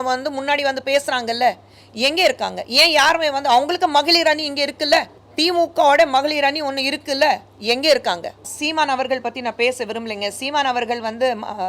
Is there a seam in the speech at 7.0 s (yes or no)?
no